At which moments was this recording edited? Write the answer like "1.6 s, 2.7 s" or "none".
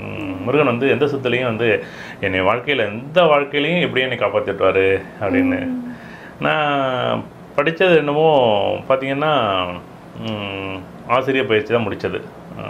none